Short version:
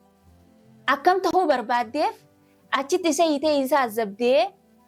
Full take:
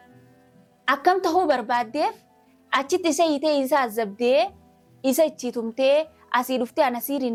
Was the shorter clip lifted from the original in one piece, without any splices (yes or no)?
yes